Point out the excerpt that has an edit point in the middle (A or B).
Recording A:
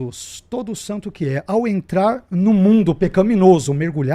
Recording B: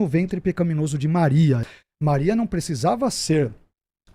B